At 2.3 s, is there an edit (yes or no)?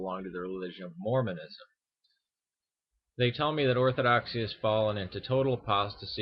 no